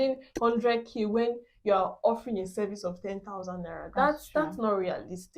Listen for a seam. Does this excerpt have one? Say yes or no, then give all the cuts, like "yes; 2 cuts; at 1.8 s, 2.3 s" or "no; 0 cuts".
no; 0 cuts